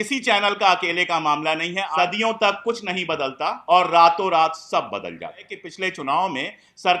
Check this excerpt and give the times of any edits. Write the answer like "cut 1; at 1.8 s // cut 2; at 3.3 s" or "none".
cut 1; at 1.9 s // cut 2; at 3.6 s // cut 3; at 5.6 s